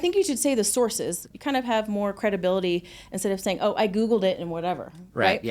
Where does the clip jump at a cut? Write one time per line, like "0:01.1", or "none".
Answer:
0:01.3